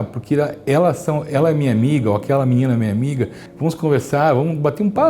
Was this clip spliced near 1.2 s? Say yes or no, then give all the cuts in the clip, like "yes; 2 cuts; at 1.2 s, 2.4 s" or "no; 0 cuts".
no; 1 cut; at 3.4 s